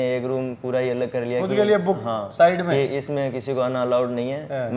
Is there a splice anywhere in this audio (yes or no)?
no